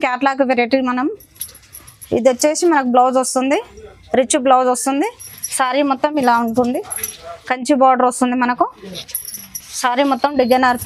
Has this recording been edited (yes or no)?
no